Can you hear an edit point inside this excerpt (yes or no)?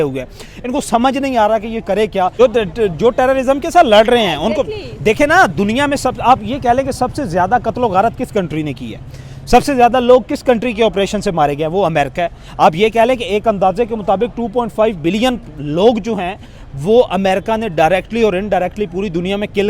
yes